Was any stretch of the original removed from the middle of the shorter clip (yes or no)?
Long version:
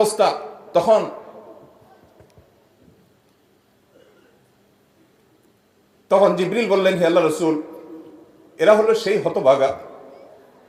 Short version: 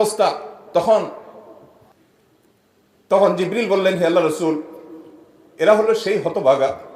yes